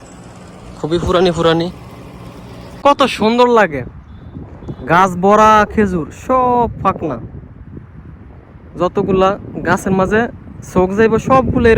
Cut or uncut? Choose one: cut